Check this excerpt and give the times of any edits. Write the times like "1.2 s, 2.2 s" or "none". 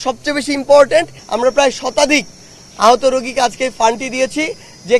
1.2 s